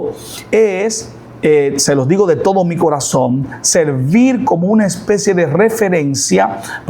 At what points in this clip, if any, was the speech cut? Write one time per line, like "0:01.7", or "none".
none